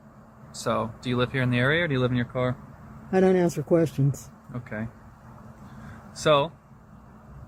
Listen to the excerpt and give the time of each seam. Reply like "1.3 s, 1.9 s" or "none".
none

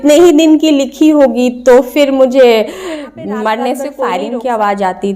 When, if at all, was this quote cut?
4.0 s

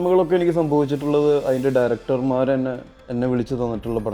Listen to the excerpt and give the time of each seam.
2.9 s

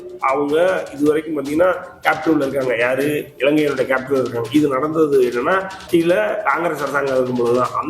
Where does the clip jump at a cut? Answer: 5.8 s

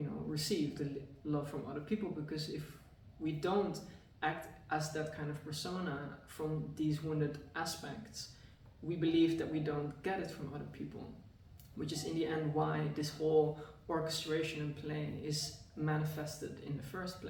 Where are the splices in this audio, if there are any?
none

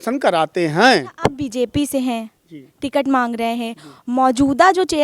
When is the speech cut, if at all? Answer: 1.1 s

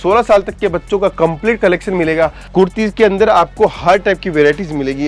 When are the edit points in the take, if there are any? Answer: 2.4 s

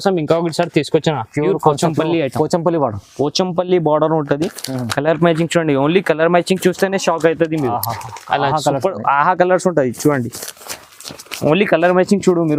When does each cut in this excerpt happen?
none

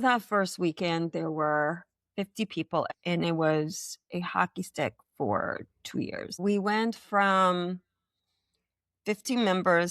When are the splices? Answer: 2.9 s, 6.4 s

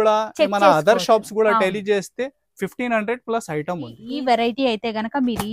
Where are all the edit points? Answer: 4.0 s

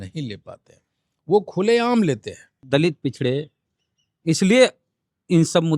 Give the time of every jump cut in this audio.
2.6 s

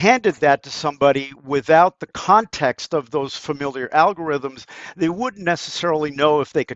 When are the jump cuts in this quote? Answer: none

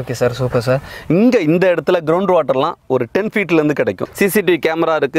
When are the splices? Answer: 0.9 s, 4.0 s

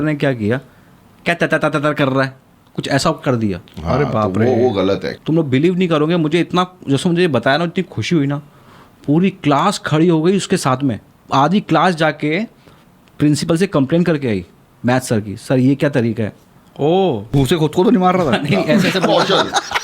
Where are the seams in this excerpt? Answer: 5.1 s, 11.1 s, 17.3 s

